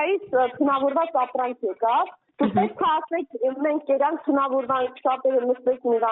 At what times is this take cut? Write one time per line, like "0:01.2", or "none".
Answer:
none